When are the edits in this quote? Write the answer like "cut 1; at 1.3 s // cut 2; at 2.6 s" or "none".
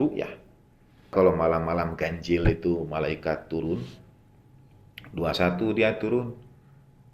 cut 1; at 1.1 s